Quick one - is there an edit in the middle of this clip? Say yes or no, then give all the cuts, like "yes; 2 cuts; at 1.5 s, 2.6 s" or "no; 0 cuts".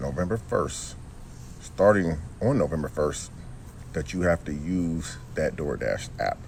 no; 0 cuts